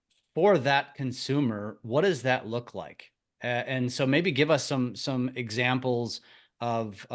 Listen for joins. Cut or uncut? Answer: uncut